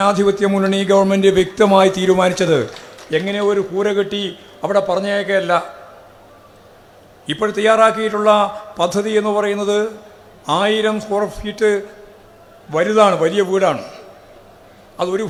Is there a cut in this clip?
no; 0 cuts

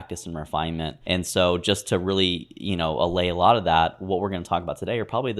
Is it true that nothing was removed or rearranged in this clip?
no; 1 cut; at 1.0 s

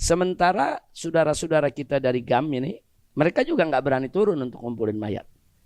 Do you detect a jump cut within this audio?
no; 0 cuts

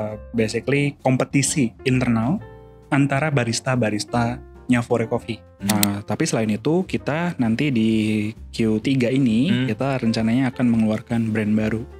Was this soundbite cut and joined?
yes; 1 cut; at 5.7 s

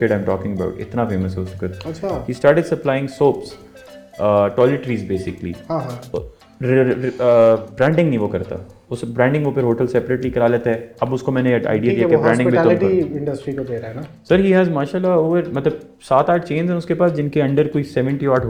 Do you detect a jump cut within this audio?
no; 0 cuts

